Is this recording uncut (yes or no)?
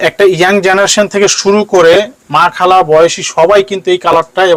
yes